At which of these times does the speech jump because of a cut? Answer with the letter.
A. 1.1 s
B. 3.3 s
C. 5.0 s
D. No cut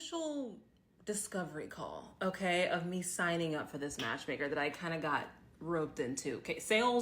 B